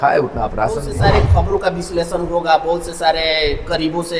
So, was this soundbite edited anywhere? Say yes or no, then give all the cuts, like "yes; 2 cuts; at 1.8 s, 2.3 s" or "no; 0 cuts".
yes; 1 cut; at 0.9 s